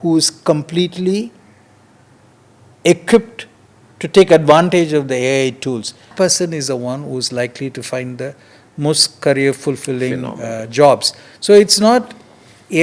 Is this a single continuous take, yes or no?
no